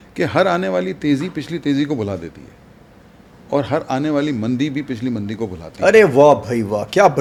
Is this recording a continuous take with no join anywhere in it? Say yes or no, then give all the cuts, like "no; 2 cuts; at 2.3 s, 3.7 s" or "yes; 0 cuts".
yes; 0 cuts